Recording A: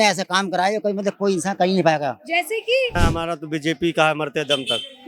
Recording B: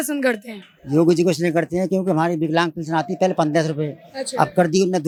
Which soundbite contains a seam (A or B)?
A